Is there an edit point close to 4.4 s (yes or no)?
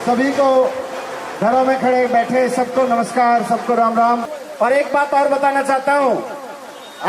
yes